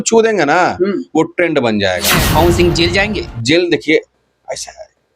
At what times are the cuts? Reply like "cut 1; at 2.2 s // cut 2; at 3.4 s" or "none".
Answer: cut 1; at 2.2 s

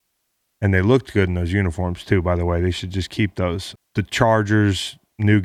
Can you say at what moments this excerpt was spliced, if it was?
cut 1; at 3.8 s

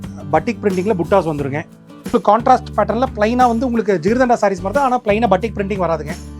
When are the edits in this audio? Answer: cut 1; at 2.1 s

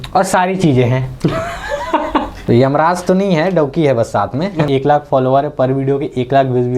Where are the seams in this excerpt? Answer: cut 1; at 2.3 s // cut 2; at 4.7 s

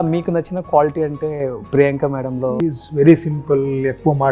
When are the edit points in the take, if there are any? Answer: cut 1; at 2.6 s

